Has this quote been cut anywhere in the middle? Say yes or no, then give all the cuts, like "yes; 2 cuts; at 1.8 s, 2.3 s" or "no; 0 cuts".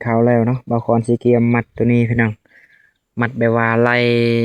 no; 0 cuts